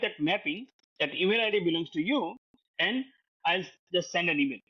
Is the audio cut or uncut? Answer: uncut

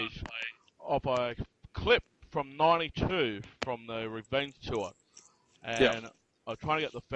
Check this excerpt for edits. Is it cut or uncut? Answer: cut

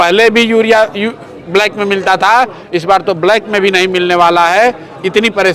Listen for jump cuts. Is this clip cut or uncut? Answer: uncut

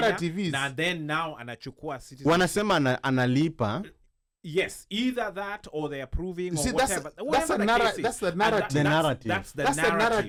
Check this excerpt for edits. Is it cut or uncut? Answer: uncut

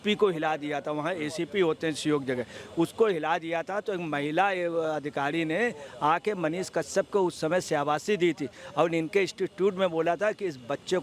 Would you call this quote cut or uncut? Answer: uncut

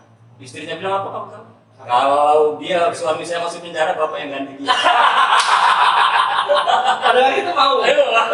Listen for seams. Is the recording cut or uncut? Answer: uncut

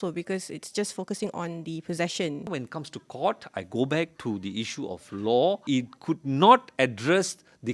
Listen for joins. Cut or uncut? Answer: cut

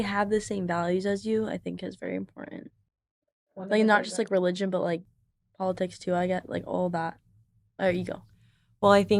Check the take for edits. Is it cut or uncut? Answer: uncut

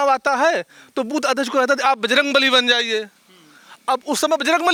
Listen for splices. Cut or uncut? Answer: uncut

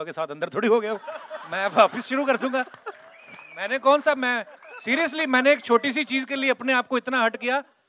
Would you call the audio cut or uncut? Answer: uncut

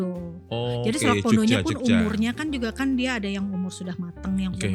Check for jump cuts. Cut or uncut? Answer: uncut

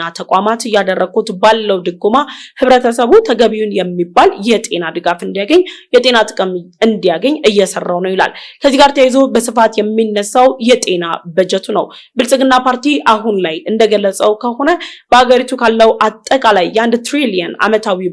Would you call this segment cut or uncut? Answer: uncut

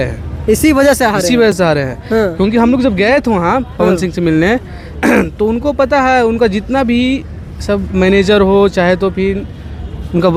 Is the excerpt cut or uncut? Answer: uncut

